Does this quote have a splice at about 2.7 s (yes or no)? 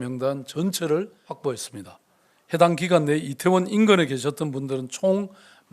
no